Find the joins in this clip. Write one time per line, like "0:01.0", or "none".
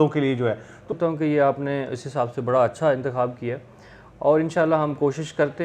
0:00.9